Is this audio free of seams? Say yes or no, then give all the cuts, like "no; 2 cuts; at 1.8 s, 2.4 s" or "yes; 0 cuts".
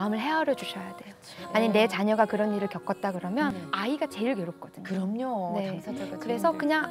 no; 1 cut; at 3.5 s